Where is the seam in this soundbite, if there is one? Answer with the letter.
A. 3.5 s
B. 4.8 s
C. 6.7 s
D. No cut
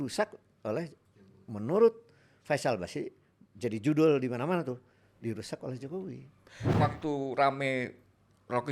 C